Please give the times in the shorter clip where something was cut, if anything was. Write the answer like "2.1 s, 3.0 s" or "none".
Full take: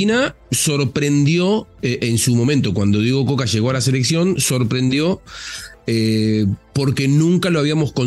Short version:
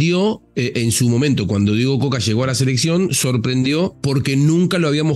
4.0 s